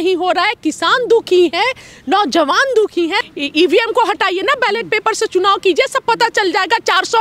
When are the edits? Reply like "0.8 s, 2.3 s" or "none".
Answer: 3.2 s